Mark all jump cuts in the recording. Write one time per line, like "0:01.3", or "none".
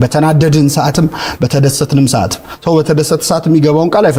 none

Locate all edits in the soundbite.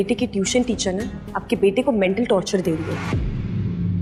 none

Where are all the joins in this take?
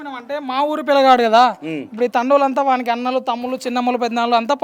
none

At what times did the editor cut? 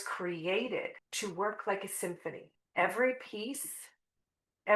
0:01.0
0:02.5

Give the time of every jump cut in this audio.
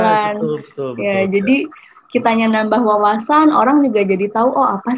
none

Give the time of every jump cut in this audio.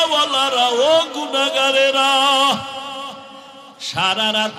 none

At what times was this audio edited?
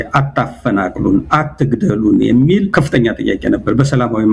0:02.7

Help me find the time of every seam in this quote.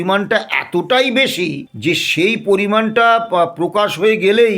0:01.7

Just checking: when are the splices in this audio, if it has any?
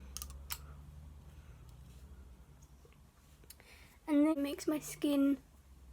0:04.4

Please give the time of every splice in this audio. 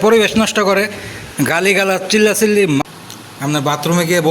0:02.8

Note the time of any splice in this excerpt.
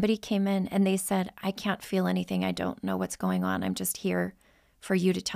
0:01.4

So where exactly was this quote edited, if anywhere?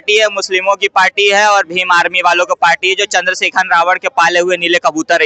none

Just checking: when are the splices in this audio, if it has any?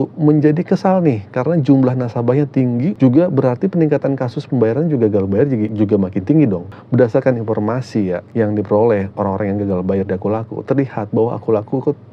0:02.9
0:05.7
0:06.7
0:08.2

